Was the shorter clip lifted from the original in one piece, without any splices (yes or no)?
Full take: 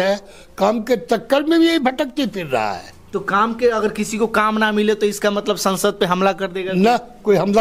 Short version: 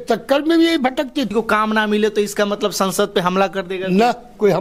no